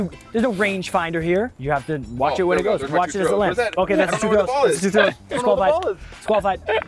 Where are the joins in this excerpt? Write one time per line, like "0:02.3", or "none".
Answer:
0:01.6